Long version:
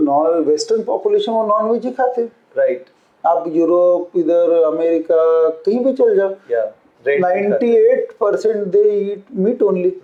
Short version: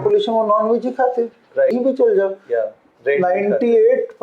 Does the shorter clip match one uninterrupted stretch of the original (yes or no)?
no